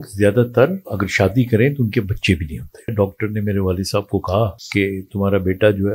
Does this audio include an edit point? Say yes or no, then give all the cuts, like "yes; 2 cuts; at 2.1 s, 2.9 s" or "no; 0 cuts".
yes; 3 cuts; at 1.0 s, 2.9 s, 4.6 s